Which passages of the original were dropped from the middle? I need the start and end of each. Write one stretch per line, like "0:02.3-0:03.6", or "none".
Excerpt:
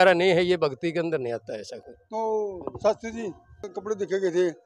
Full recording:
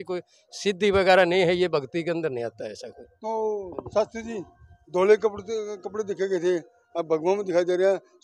0:04.8-0:05.8

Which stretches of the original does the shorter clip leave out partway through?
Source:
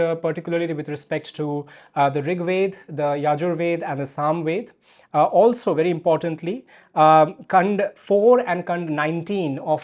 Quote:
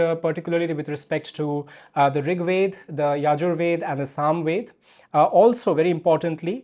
none

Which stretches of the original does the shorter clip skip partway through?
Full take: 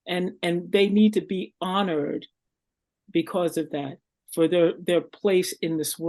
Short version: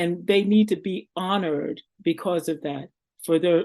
0:02.3-0:03.0

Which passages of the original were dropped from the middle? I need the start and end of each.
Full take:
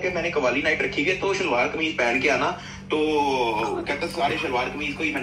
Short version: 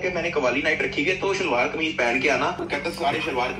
0:02.6-0:03.8

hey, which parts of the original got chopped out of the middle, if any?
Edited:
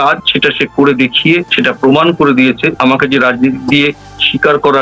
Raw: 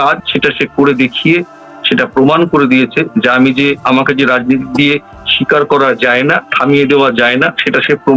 0:01.5-0:01.8
0:03.1-0:03.8

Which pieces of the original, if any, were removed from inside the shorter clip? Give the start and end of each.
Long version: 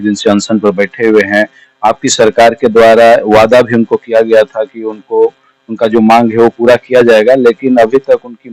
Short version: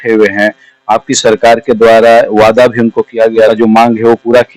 0:04.4-0:05.8

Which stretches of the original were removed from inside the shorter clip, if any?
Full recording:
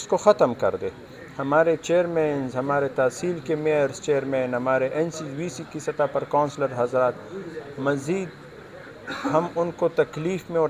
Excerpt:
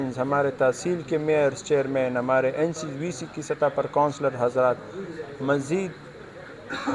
none

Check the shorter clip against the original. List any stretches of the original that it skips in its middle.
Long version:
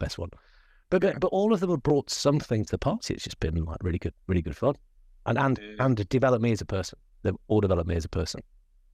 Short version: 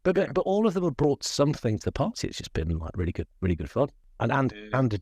0:04.9-0:05.1

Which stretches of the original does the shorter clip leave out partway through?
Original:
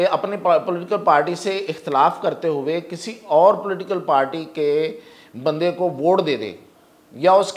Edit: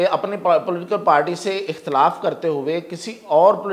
none

